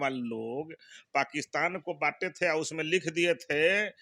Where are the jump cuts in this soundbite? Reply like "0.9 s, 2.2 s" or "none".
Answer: none